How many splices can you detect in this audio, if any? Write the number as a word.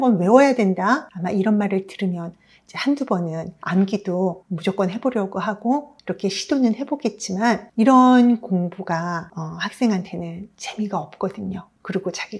one